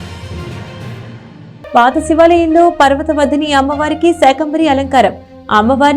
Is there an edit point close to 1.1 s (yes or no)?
yes